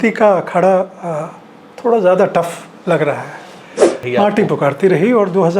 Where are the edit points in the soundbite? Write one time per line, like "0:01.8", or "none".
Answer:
0:04.1

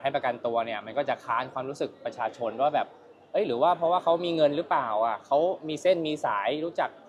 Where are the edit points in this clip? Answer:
none

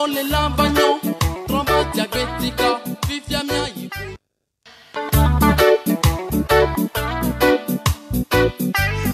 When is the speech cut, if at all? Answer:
0:04.1

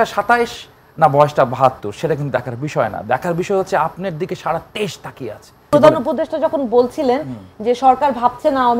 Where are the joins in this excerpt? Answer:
0:05.7

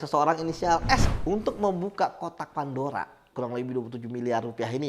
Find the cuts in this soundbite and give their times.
0:01.0
0:03.3

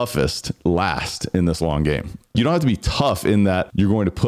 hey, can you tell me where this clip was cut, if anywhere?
0:02.3

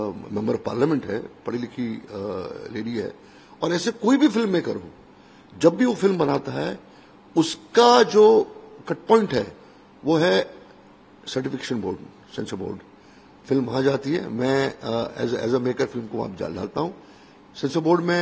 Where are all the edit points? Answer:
none

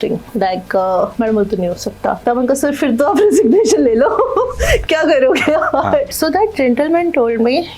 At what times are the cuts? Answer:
0:02.2
0:06.1

